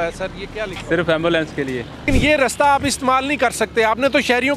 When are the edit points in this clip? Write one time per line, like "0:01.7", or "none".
0:02.0